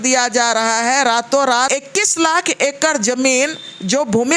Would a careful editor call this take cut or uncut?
cut